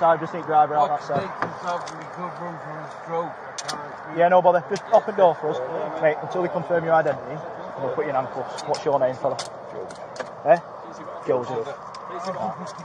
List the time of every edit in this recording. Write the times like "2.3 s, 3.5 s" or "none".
none